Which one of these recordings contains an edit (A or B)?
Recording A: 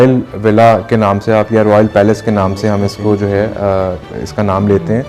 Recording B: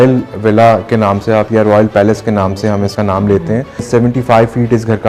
B